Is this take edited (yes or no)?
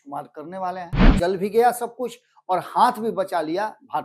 yes